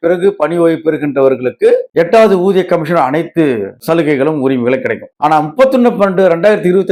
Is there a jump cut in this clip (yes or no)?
no